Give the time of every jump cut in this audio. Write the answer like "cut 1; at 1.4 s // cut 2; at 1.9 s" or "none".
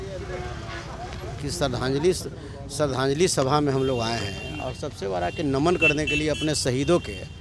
cut 1; at 1.3 s